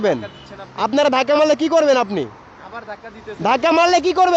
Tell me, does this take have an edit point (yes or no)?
no